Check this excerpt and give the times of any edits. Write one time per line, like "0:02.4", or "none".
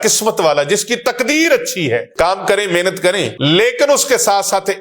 0:02.1
0:03.3